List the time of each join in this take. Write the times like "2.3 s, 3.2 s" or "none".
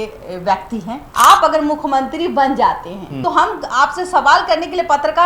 1.0 s, 3.1 s